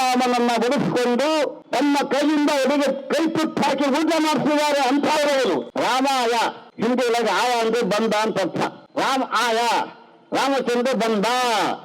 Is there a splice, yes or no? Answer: yes